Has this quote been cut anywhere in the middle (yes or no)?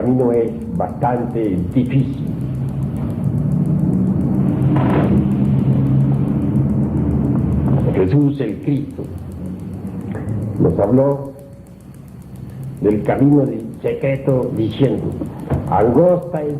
no